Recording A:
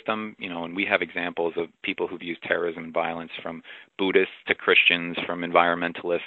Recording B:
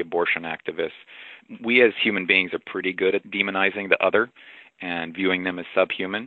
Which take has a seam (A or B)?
B